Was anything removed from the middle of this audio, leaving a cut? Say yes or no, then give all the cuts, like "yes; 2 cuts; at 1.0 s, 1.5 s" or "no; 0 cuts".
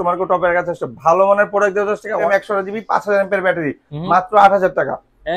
yes; 1 cut; at 2.3 s